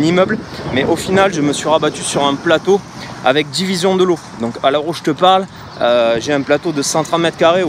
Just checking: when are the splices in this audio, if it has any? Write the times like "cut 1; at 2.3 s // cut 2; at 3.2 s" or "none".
none

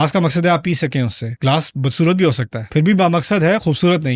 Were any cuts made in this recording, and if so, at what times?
cut 1; at 1.2 s // cut 2; at 2.5 s

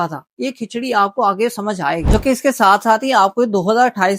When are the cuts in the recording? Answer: cut 1; at 2.0 s

